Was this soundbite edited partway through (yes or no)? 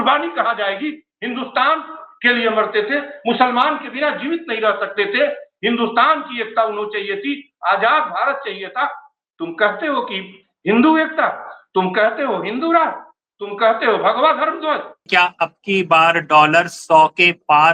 yes